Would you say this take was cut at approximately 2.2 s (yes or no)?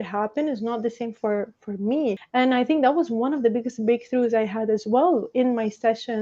yes